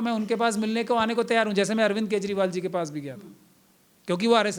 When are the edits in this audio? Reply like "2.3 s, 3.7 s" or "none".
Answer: none